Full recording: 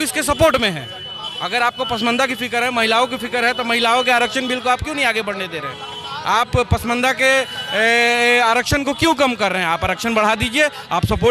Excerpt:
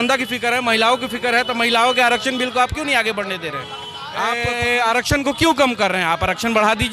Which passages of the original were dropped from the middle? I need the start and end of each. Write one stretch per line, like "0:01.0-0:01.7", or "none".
0:06.4-0:07.9